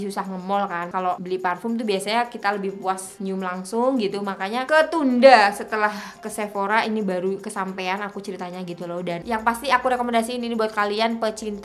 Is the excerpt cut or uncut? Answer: cut